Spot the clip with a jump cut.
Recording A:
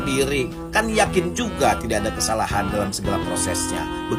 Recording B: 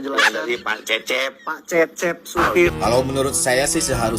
B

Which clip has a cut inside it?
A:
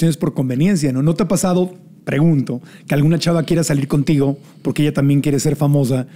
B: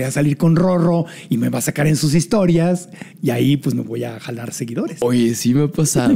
B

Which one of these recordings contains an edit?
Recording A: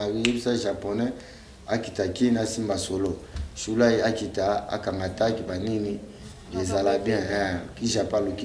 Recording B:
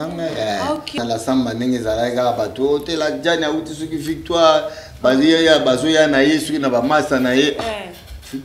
B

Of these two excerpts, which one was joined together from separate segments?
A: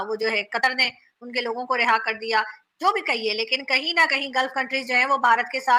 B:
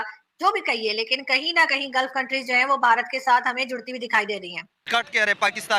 B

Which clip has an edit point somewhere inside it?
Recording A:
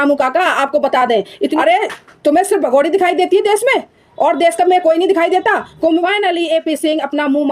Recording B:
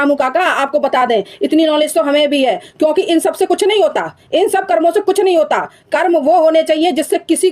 A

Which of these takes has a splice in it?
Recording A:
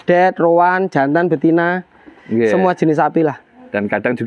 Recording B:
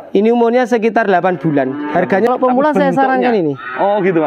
B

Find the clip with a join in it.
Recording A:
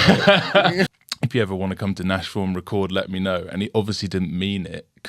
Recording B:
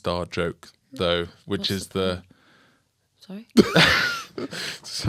A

